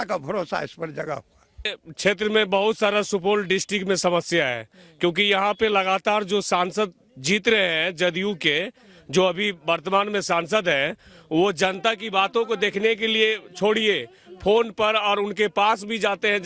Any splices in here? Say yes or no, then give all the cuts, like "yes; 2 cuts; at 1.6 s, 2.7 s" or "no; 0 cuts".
yes; 1 cut; at 1.8 s